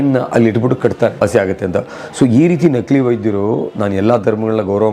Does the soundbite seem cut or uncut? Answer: cut